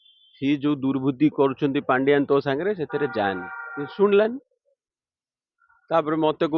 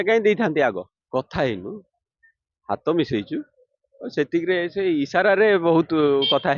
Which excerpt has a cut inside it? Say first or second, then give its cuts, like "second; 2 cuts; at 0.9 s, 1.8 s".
second; 1 cut; at 1.0 s